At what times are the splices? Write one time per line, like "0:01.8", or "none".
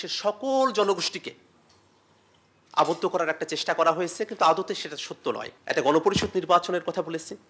0:05.5